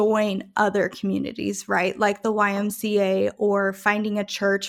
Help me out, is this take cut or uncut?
uncut